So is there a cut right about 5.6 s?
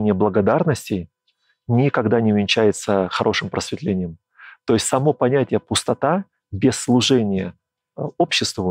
no; 0 cuts

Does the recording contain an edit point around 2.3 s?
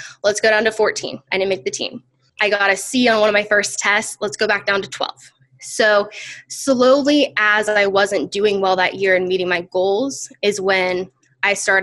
yes; 1 cut; at 2.3 s

